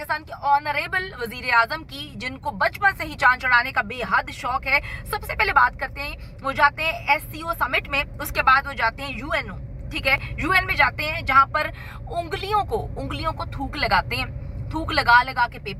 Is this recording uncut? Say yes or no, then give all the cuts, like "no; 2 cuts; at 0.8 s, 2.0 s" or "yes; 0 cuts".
yes; 0 cuts